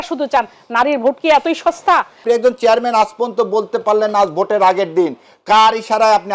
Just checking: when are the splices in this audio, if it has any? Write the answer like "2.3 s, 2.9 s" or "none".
2.2 s